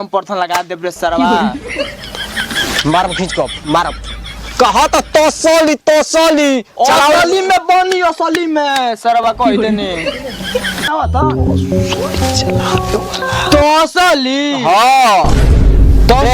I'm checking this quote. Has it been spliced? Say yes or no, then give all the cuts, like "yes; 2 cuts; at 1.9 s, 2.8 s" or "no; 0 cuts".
yes; 1 cut; at 10.9 s